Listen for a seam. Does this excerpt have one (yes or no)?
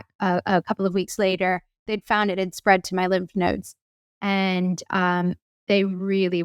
no